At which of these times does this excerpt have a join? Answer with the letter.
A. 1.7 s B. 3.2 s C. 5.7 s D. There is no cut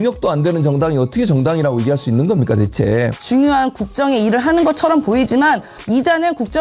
B